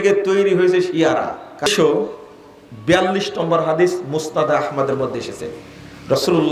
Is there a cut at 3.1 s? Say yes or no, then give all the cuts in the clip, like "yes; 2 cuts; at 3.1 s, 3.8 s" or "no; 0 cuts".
no; 1 cut; at 1.7 s